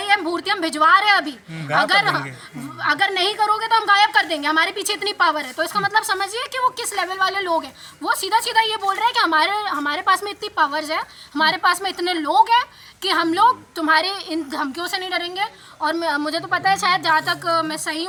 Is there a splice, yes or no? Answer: no